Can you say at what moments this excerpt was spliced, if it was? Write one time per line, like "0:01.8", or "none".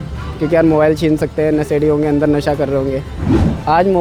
none